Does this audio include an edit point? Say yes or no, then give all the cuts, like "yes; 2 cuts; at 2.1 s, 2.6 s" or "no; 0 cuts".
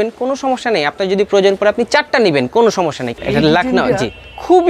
yes; 1 cut; at 3.1 s